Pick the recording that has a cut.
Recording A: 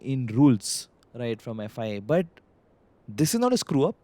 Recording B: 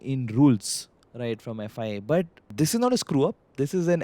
B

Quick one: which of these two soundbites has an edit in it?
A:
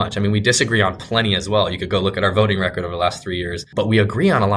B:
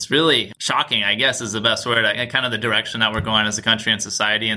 A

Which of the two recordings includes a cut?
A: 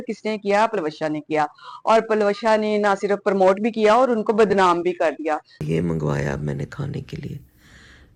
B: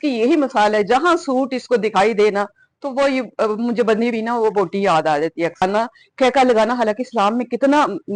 B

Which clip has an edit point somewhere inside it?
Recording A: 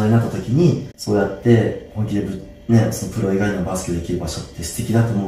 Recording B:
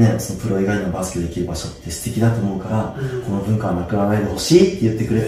A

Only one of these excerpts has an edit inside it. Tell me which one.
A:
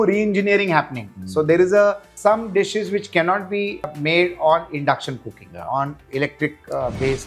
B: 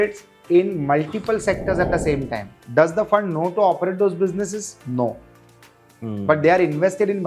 A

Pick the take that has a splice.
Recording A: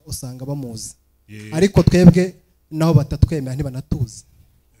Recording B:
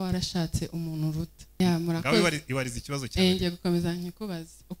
B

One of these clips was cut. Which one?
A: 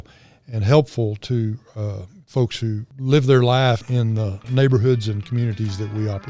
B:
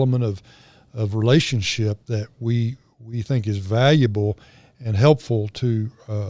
A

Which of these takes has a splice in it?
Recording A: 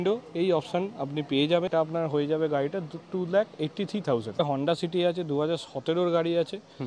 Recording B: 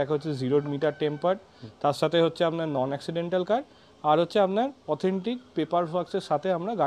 A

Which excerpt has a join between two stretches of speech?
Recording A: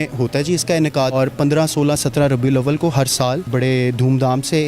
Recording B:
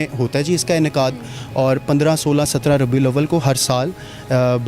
A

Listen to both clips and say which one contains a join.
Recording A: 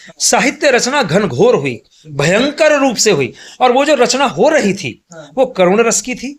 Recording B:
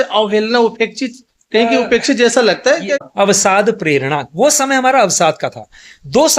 B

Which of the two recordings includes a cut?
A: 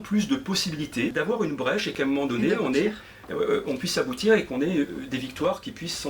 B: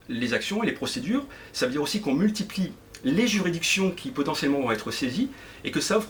A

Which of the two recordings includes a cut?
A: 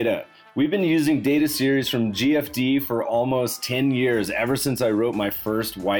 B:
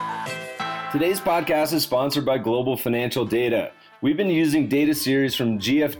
B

